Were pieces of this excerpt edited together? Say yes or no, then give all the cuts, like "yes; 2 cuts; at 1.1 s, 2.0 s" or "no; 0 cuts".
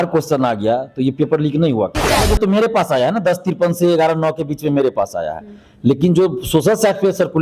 yes; 1 cut; at 2.2 s